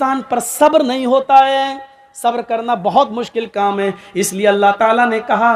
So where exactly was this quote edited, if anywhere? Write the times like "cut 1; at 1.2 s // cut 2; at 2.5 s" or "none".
none